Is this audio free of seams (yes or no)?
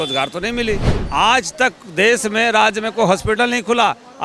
no